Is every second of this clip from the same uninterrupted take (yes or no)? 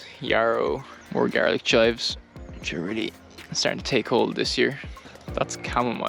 no